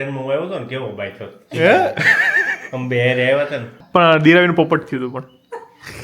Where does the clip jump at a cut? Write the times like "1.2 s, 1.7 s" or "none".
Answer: 3.7 s